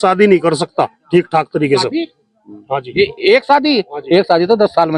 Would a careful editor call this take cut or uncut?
uncut